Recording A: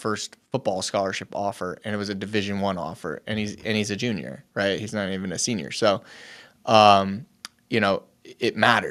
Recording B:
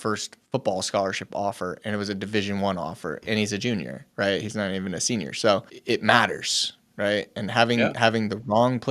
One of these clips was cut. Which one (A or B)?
B